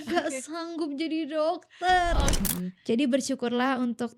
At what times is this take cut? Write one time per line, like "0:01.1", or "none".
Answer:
0:02.4